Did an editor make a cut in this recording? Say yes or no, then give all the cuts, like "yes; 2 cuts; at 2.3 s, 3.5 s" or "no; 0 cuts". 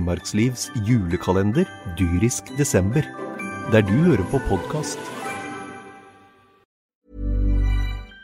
yes; 1 cut; at 7.0 s